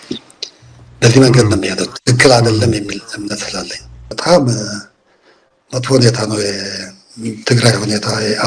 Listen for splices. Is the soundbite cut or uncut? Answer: cut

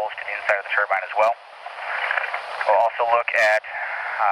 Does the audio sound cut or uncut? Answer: uncut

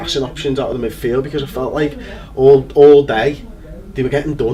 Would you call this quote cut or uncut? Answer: uncut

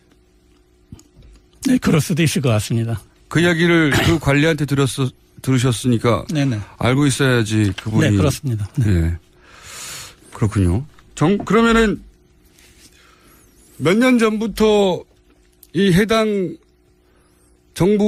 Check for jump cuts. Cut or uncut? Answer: uncut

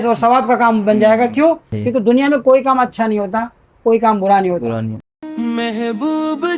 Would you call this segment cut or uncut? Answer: cut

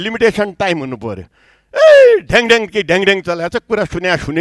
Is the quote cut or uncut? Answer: uncut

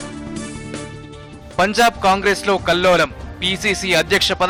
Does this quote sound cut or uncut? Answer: uncut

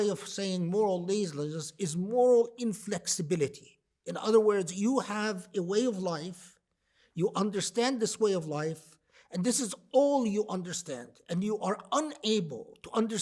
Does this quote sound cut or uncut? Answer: uncut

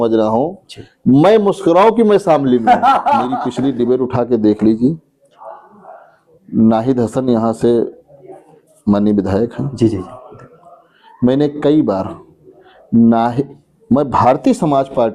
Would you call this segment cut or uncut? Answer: cut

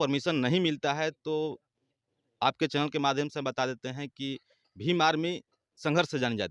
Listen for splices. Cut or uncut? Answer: uncut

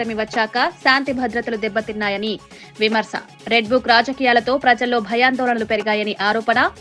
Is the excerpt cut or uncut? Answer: uncut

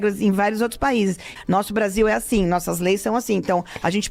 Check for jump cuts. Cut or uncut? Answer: cut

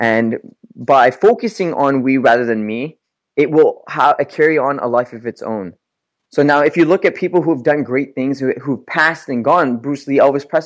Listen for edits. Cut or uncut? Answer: uncut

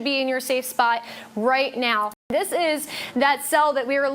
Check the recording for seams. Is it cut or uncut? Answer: uncut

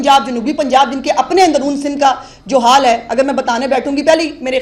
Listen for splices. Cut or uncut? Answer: uncut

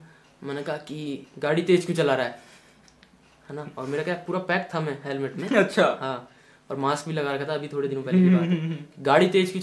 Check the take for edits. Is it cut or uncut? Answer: uncut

